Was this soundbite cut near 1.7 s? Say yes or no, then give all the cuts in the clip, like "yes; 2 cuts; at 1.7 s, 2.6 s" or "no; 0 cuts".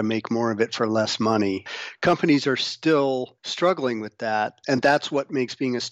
yes; 3 cuts; at 1.7 s, 3.4 s, 4.6 s